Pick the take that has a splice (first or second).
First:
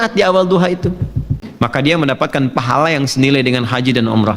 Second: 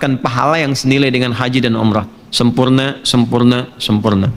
first